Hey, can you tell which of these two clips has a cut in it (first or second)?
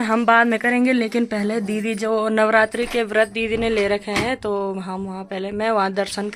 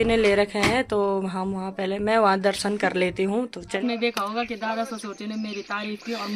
second